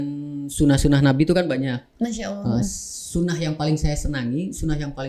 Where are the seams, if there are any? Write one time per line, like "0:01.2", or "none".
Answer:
none

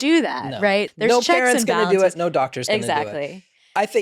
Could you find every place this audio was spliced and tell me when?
0:00.9

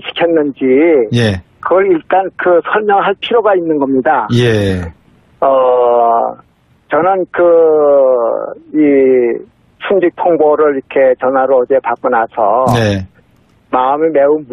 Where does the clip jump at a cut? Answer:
none

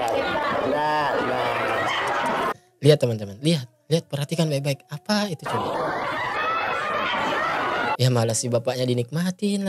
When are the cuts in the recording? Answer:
none

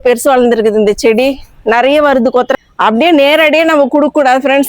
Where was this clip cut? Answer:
0:02.5

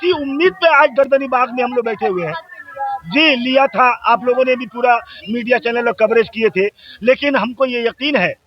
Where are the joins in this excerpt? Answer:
none

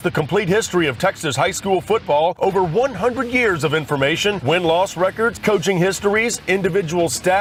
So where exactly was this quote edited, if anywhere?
none

